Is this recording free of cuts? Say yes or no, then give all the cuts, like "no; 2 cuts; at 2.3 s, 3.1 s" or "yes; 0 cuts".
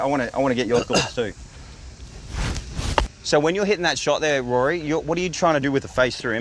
yes; 0 cuts